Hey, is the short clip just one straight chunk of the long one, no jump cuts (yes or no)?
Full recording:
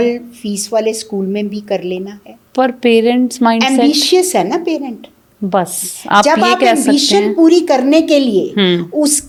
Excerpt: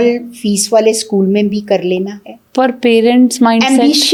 yes